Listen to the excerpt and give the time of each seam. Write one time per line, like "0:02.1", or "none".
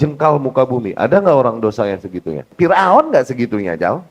0:02.5